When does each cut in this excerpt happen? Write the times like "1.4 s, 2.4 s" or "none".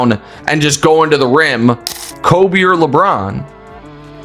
1.9 s